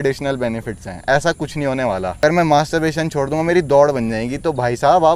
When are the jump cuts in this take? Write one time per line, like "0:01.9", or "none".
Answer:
0:02.2